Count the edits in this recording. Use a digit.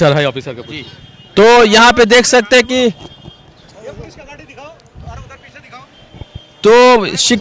0